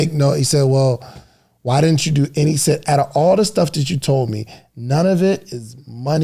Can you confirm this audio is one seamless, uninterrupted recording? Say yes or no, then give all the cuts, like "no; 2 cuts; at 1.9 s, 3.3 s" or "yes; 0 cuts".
yes; 0 cuts